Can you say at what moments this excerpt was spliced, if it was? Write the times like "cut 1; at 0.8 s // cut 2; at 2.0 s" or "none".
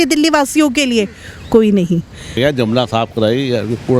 cut 1; at 2.4 s